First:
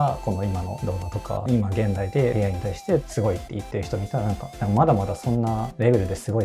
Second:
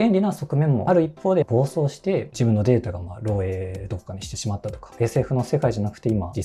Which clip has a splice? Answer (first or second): second